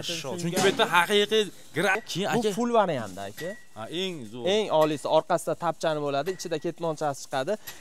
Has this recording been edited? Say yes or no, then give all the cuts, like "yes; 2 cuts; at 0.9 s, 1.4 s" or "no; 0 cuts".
yes; 1 cut; at 2.0 s